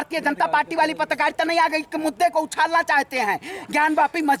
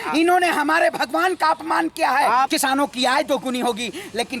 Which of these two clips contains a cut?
second; 1 cut; at 2.5 s

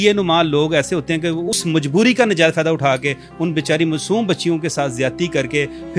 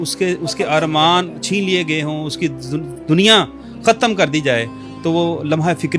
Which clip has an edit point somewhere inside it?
first; 1 cut; at 1.5 s

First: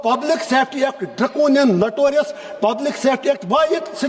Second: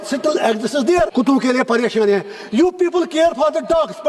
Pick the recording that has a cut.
second; 1 cut; at 1.1 s

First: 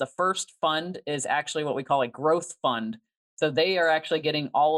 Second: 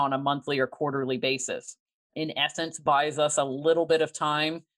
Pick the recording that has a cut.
second; 1 cut; at 2.1 s

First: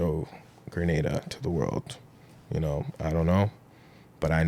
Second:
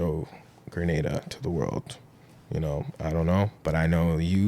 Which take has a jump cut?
second; 1 cut; at 3.6 s

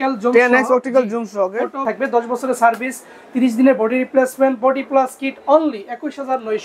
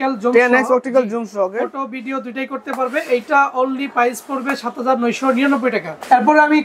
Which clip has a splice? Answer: first; 1 cut; at 1.8 s

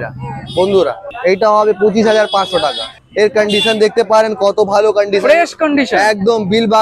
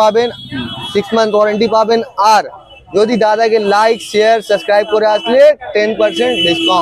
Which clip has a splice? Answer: first; 2 cuts; at 1.1 s, 2.9 s

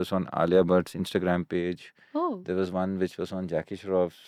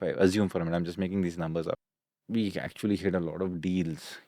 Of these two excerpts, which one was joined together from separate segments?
second; 1 cut; at 1.8 s

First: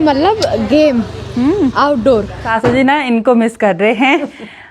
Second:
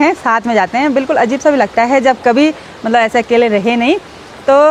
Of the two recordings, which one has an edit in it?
first; 1 cut; at 2.4 s

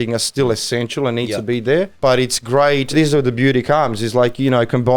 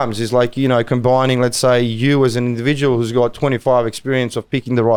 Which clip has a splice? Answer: first; 2 cuts; at 1.9 s, 2.9 s

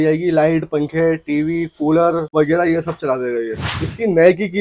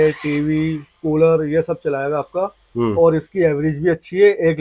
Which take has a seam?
first; 2 cuts; at 2.3 s, 3.7 s

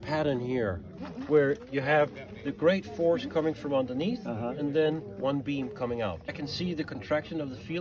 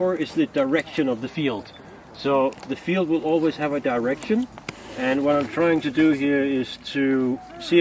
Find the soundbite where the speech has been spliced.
first; 2 cuts; at 0.9 s, 6.3 s

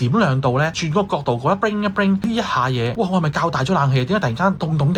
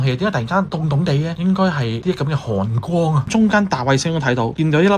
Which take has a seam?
second; 1 cut; at 3.3 s

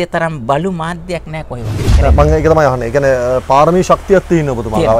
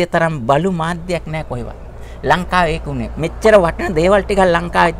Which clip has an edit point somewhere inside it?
first; 1 cut; at 1.8 s

